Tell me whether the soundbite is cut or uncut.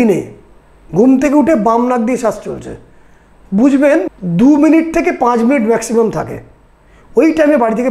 cut